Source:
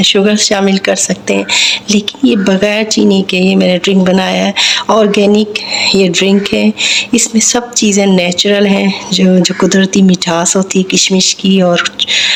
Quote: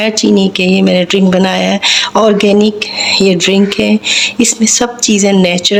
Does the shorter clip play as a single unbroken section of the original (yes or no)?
yes